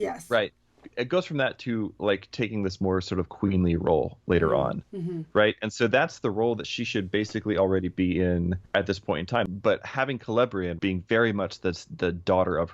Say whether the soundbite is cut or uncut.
cut